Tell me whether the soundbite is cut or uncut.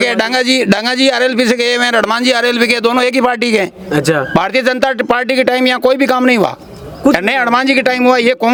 uncut